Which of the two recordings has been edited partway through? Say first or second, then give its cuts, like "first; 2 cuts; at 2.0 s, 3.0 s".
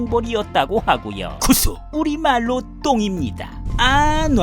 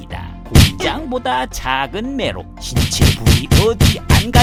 first; 1 cut; at 1.3 s